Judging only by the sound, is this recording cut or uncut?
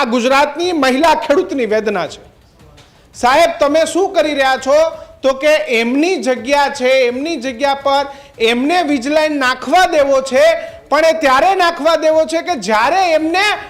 uncut